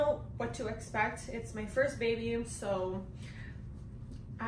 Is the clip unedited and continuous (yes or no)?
yes